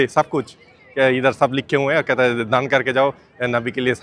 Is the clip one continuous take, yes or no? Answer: yes